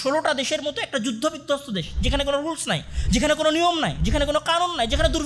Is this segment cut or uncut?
uncut